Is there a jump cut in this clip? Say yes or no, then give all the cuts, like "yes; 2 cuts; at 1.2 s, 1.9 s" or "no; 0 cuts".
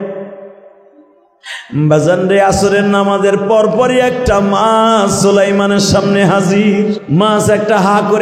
yes; 1 cut; at 7.0 s